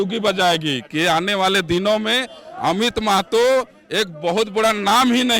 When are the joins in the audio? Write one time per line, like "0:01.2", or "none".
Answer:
none

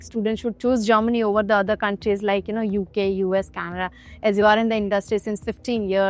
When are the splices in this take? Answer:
none

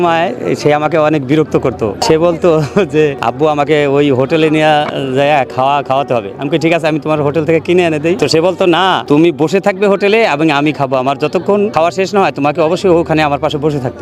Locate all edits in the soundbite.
0:02.0
0:03.2
0:08.2
0:09.0
0:11.7

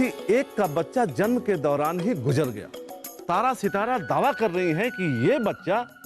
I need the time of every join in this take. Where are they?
0:03.2

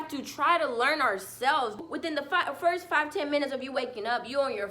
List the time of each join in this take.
0:01.8

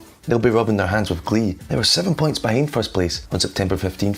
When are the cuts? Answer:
0:01.6
0:03.2

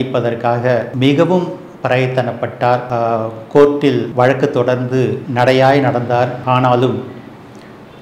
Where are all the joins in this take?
0:00.9
0:02.9
0:04.1
0:05.2
0:06.4

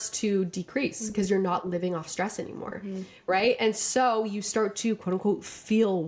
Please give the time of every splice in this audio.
none

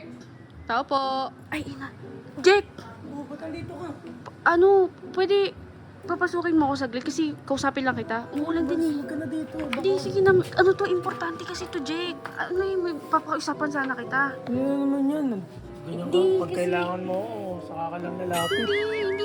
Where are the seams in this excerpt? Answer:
0:01.4
0:08.3
0:12.3

